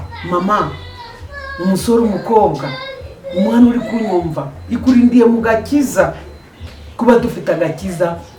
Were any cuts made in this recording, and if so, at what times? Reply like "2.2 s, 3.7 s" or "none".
none